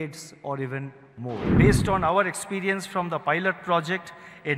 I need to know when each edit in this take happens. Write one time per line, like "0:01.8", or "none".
0:01.5